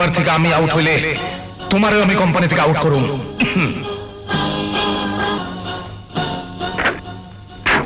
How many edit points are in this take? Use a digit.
1